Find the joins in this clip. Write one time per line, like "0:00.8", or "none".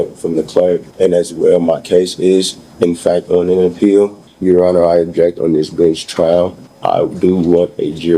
0:00.9
0:04.3
0:06.7